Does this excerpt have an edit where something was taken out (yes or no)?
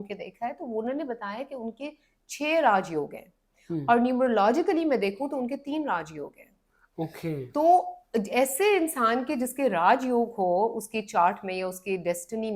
no